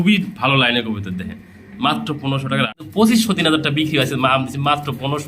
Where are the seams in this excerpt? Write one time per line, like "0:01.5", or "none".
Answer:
0:02.9